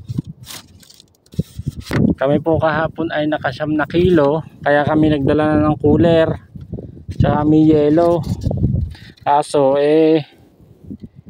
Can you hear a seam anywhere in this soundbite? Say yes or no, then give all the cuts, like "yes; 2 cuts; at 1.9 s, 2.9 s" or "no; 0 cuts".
yes; 1 cut; at 1.9 s